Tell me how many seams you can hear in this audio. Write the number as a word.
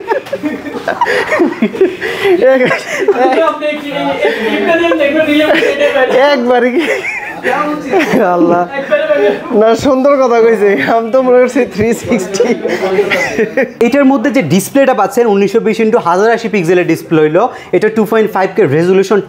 zero